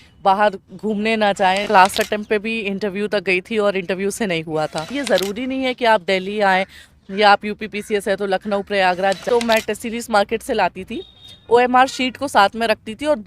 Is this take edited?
yes; 3 cuts; at 1.7 s, 5.0 s, 9.2 s

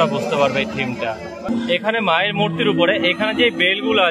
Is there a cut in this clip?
yes; 1 cut; at 1.6 s

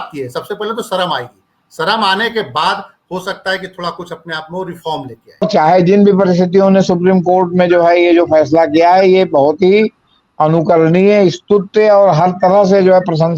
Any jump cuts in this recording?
yes; 1 cut; at 5.4 s

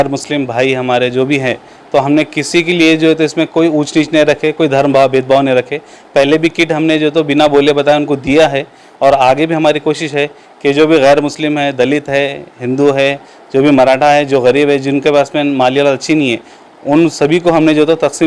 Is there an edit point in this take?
no; 0 cuts

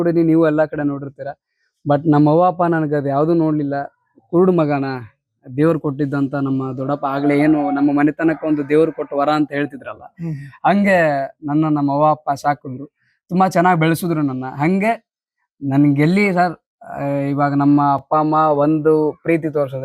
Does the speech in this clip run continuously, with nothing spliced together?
yes; 0 cuts

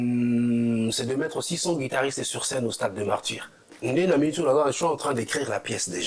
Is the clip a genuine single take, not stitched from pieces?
no; 1 cut; at 3.7 s

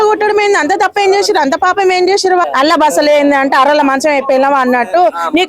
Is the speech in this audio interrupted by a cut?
yes; 1 cut; at 2.4 s

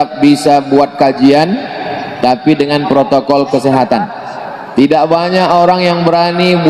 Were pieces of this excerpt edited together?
yes; 1 cut; at 5.0 s

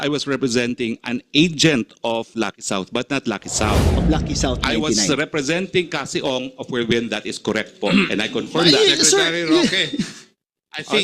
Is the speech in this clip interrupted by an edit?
yes; 1 cut; at 3.9 s

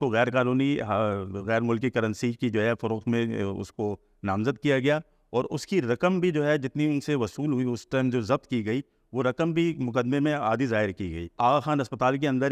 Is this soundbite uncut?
no; 1 cut; at 11.4 s

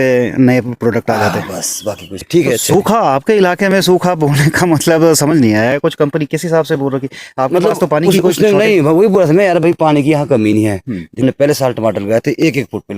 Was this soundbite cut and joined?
yes; 2 cuts; at 2.1 s, 11.2 s

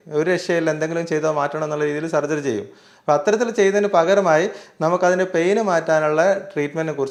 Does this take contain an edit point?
no; 0 cuts

